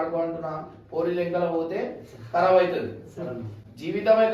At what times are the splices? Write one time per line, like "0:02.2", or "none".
none

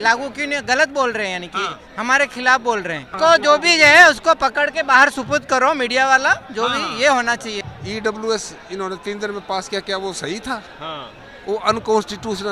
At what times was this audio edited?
0:03.1
0:07.6

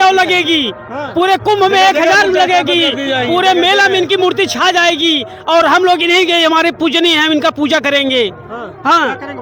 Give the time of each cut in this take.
none

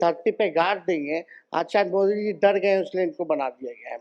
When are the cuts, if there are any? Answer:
none

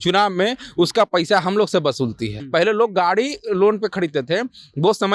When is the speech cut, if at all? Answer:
0:02.4

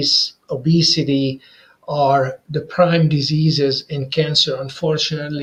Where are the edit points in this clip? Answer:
none

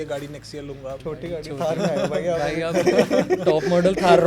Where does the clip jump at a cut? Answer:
0:01.0

